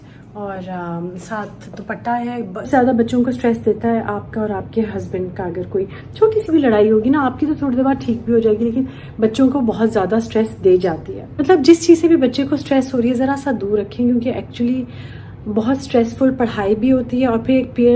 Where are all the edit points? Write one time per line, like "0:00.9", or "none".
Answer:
0:02.7
0:11.3